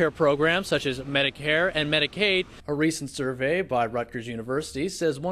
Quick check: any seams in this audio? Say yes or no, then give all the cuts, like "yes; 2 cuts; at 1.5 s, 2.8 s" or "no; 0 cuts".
yes; 1 cut; at 2.6 s